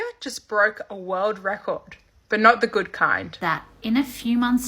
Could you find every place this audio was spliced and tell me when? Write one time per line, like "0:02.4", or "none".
0:03.3